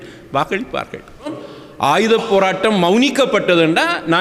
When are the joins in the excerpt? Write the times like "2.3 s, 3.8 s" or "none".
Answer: 1.4 s

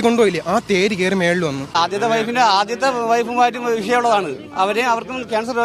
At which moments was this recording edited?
1.8 s

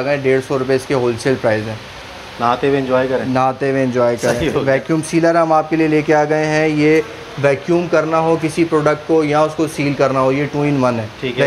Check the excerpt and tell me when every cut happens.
none

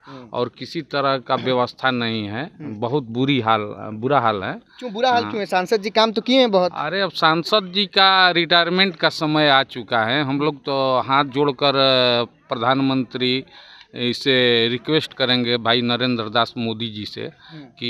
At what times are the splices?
none

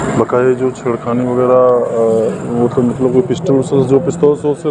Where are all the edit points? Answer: none

